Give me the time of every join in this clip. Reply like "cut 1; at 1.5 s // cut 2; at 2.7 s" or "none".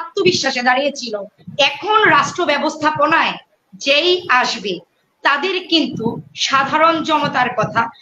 cut 1; at 1.4 s